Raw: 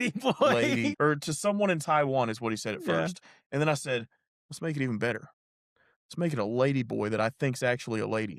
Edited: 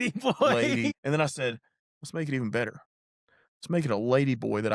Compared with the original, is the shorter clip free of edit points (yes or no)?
no